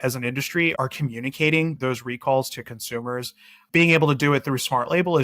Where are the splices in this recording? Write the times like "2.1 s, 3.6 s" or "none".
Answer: 3.6 s

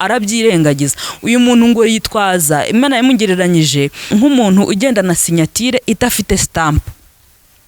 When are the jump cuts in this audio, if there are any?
4.1 s

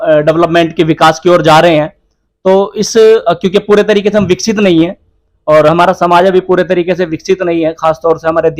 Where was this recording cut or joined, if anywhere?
none

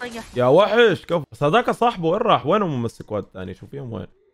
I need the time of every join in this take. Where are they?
1.3 s

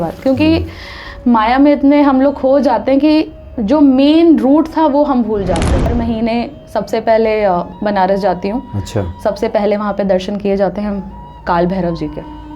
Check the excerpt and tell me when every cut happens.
5.9 s

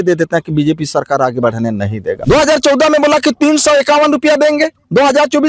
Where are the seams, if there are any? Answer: 2.2 s

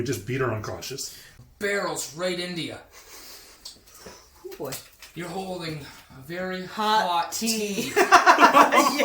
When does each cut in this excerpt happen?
1.4 s

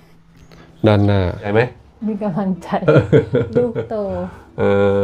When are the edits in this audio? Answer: 1.5 s

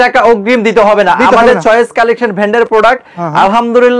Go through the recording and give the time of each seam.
none

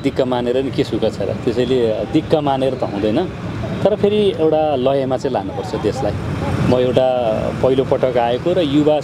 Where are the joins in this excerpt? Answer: none

